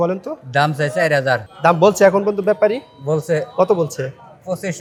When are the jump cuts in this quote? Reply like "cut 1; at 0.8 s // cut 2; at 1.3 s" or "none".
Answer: none